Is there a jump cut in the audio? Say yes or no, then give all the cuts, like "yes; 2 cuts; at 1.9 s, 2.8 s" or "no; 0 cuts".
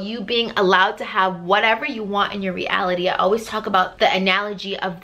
yes; 1 cut; at 3.9 s